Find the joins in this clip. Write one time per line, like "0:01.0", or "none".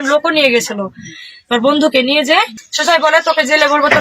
0:02.6